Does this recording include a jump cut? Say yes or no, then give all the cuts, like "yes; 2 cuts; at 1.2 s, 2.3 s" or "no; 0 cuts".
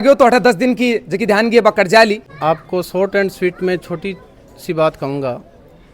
yes; 1 cut; at 2.3 s